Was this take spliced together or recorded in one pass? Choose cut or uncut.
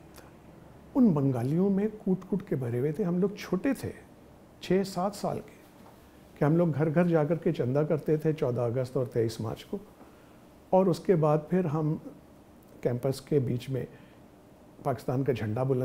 uncut